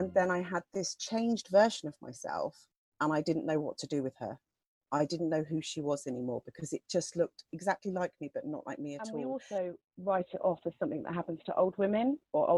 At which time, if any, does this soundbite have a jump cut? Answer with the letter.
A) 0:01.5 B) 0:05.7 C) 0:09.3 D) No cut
C